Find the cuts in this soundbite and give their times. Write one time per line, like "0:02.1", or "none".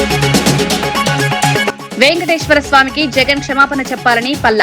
0:01.2